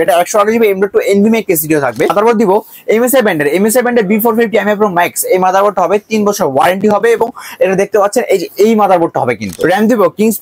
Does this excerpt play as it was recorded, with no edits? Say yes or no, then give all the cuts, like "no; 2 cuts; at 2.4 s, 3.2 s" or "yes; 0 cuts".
no; 2 cuts; at 2.1 s, 9.5 s